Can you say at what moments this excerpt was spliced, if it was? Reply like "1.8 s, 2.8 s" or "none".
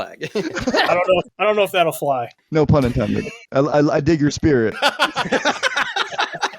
1.3 s, 2.4 s, 3.4 s, 4.8 s